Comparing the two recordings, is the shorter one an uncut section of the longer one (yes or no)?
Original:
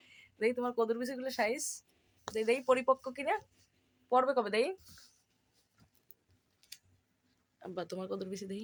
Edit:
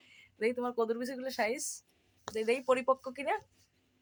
yes